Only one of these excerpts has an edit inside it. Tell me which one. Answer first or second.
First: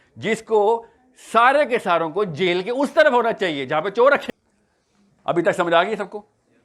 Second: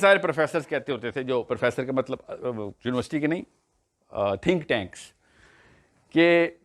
first